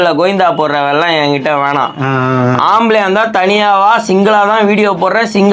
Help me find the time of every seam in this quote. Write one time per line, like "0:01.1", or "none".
none